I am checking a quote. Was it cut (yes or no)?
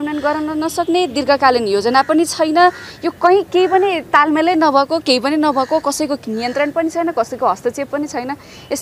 no